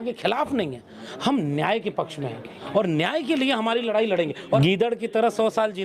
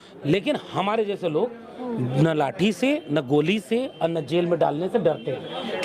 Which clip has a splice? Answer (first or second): first